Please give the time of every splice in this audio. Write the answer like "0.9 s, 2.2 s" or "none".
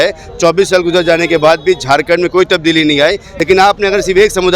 3.3 s